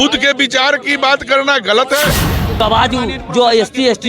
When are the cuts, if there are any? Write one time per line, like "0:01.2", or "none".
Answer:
0:02.6